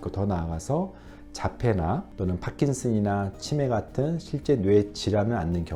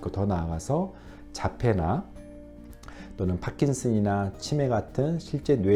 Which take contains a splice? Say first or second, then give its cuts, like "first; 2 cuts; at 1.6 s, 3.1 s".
first; 1 cut; at 2.1 s